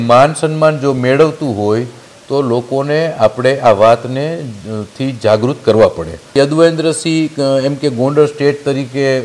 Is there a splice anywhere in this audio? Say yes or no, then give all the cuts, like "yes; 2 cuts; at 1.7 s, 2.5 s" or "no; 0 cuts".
yes; 1 cut; at 6.3 s